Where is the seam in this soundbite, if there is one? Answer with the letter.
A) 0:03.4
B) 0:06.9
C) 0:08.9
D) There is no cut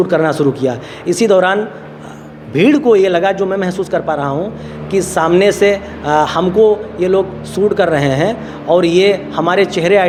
D